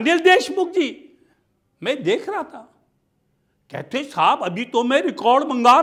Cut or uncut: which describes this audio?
uncut